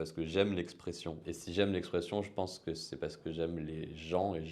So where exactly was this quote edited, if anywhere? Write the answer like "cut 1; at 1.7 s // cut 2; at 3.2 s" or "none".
cut 1; at 1.3 s